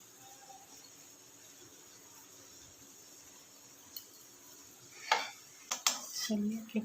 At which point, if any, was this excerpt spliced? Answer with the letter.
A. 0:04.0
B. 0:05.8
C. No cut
B